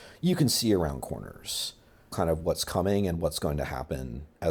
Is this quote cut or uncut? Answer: uncut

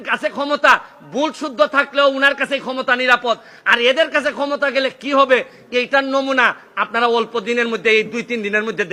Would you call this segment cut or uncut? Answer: uncut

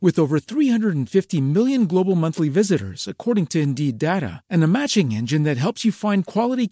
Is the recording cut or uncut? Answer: uncut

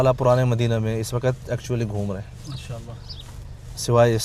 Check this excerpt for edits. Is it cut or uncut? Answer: uncut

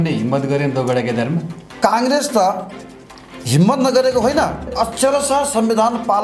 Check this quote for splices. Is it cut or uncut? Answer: cut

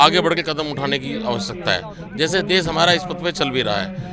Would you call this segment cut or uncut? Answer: uncut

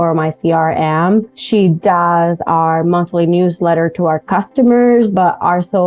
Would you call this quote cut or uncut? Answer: cut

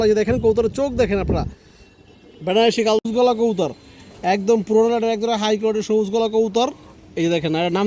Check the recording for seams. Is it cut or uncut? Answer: cut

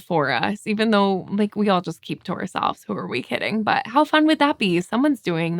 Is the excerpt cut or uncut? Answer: uncut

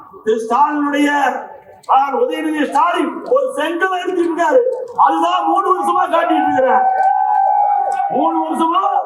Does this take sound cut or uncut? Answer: uncut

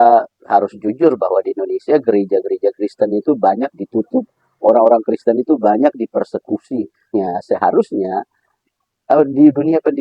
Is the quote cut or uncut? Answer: cut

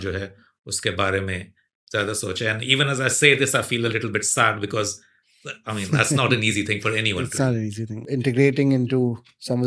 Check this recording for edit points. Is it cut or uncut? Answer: cut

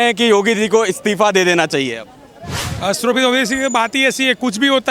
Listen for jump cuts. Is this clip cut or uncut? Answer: uncut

